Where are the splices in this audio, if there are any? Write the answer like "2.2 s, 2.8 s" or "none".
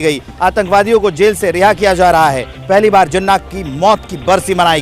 none